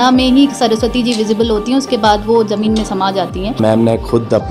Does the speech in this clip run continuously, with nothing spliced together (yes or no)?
no